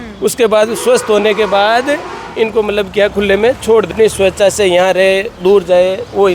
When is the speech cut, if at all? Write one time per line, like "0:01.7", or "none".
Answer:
none